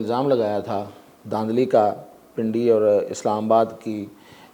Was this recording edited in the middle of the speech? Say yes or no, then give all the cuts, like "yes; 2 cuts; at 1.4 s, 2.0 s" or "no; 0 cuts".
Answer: no; 0 cuts